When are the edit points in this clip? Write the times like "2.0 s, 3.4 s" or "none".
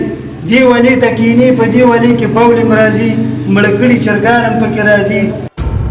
none